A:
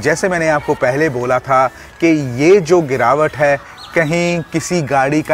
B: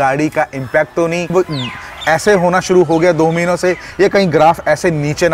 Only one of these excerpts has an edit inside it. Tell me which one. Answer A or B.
B